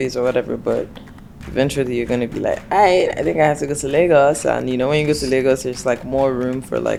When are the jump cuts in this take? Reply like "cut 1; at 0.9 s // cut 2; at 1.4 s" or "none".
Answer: none